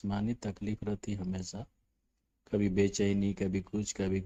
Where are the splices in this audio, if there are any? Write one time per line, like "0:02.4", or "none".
none